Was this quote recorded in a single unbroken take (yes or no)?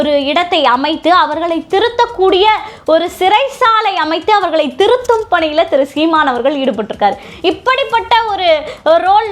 yes